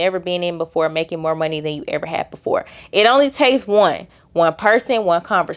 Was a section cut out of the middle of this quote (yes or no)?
no